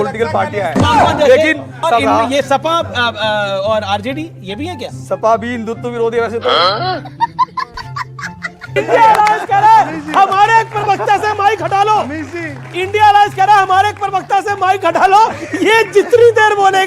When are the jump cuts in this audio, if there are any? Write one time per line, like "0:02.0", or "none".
0:01.7
0:08.7

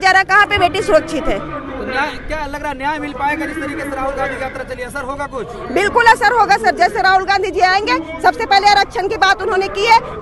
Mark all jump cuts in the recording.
none

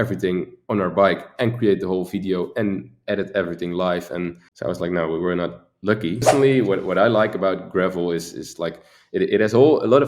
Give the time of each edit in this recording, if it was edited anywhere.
0:04.5
0:06.3

